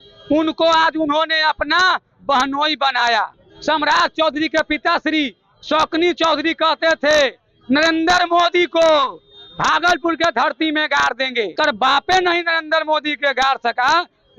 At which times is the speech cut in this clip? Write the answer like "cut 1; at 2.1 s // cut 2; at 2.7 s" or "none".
cut 1; at 3.4 s // cut 2; at 11.5 s